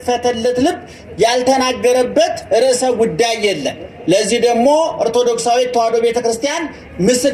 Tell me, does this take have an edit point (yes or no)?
no